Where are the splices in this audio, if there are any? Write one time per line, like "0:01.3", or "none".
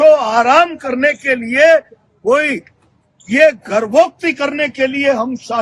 none